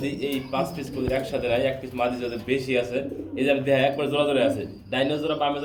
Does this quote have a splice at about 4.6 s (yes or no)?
no